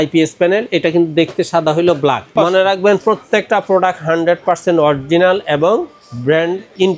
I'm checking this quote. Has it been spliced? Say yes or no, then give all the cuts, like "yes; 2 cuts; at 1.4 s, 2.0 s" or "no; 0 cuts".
yes; 1 cut; at 2.3 s